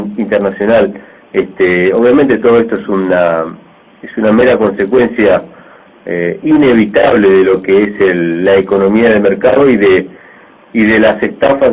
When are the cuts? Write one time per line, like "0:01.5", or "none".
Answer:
none